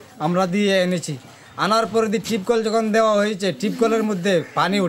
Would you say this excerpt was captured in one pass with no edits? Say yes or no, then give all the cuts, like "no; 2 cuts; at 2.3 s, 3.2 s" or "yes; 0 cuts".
yes; 0 cuts